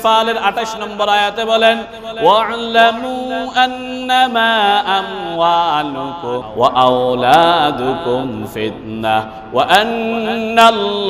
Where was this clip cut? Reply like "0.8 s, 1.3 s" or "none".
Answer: 6.5 s